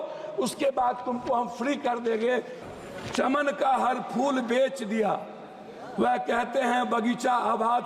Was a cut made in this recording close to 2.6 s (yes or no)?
yes